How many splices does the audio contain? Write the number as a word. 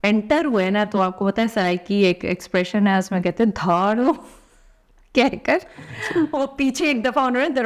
zero